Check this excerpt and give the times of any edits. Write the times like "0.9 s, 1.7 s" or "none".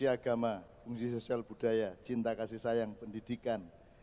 none